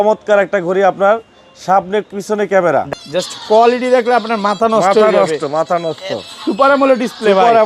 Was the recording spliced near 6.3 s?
no; 1 cut; at 2.9 s

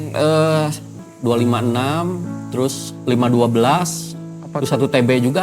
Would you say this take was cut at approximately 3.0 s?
no; 1 cut; at 1.0 s

